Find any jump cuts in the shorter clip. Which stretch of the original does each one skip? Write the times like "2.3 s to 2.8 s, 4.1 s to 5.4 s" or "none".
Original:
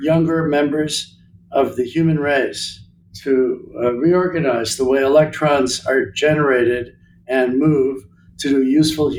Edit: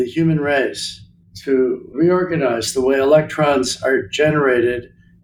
3.7 s to 4.0 s